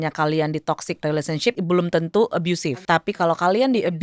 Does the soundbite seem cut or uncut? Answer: cut